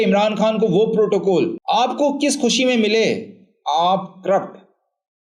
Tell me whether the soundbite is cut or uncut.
uncut